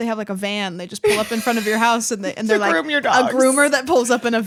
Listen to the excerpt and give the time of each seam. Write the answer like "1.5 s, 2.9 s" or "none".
none